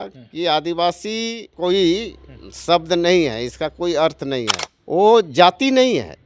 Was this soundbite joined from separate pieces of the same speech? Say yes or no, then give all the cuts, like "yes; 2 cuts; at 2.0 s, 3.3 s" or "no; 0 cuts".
yes; 2 cuts; at 1.5 s, 4.6 s